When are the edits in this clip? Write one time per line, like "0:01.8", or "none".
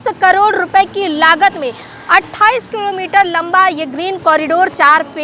none